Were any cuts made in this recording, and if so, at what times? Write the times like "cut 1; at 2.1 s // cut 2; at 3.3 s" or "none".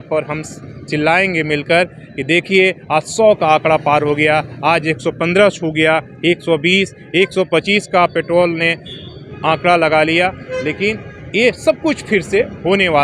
none